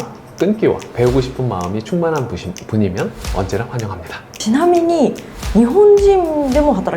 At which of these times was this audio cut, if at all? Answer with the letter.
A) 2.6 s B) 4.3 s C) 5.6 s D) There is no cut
B